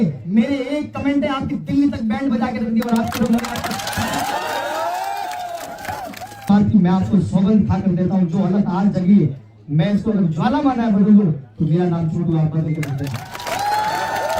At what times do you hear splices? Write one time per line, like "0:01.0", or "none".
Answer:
0:06.4